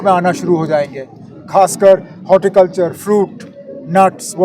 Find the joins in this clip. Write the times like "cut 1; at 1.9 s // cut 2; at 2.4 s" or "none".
none